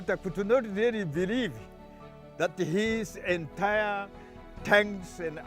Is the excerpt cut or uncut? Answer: uncut